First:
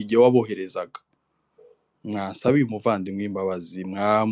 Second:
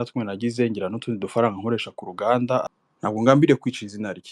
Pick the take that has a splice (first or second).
second